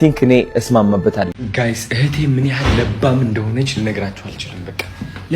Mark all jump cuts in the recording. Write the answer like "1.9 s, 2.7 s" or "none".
1.4 s